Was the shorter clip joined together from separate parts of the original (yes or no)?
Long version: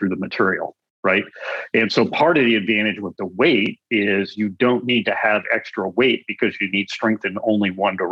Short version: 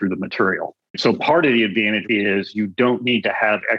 yes